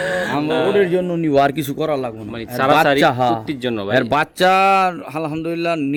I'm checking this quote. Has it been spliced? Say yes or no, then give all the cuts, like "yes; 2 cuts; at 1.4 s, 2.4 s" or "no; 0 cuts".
no; 0 cuts